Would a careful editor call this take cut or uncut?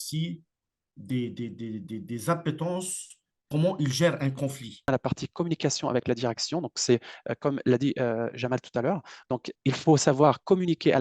cut